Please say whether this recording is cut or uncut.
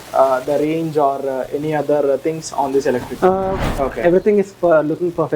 cut